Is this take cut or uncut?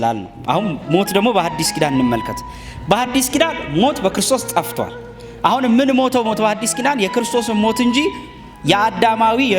uncut